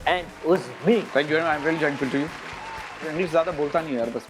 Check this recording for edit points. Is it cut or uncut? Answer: cut